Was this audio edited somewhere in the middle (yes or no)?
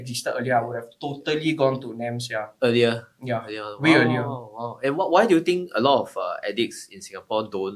no